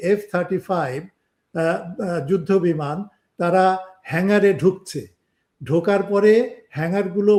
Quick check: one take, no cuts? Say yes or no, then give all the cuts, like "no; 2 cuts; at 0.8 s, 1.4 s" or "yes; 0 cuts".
yes; 0 cuts